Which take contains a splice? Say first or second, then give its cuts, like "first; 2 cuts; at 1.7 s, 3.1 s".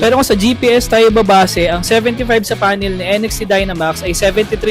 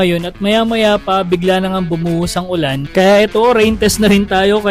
second; 1 cut; at 2.8 s